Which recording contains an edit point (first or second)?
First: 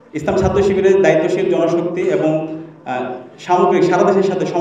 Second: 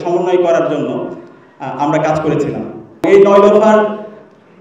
second